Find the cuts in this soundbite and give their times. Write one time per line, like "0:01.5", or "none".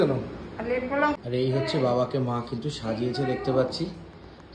0:01.2